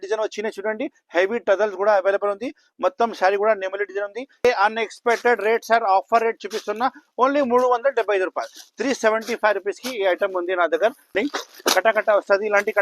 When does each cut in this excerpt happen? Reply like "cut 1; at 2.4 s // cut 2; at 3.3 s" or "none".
cut 1; at 4.4 s // cut 2; at 11.1 s